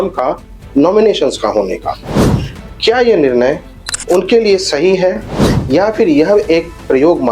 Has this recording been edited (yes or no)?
no